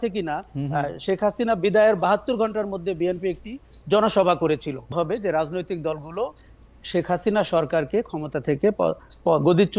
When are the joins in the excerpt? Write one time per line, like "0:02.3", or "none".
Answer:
0:04.9